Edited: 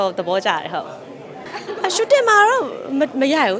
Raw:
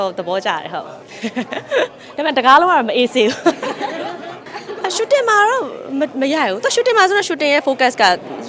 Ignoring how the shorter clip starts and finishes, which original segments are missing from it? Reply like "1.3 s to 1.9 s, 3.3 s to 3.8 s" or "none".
1.2 s to 4.2 s